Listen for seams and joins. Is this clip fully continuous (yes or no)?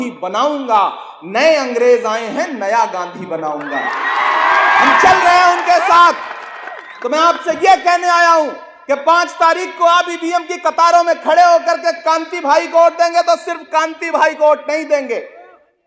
yes